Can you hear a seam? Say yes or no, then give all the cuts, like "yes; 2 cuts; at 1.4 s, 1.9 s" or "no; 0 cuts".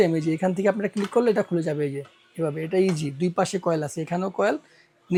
no; 0 cuts